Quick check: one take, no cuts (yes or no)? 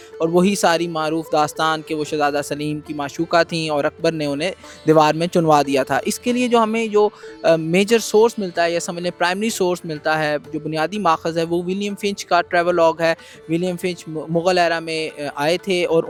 yes